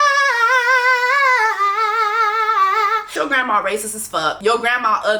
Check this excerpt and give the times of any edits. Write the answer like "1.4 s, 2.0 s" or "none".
3.1 s, 4.4 s